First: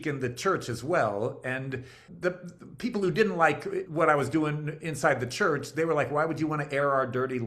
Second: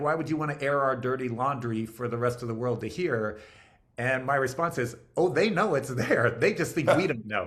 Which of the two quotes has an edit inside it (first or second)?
first